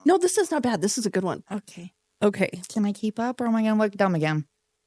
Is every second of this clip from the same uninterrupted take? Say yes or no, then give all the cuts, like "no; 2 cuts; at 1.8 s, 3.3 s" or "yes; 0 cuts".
yes; 0 cuts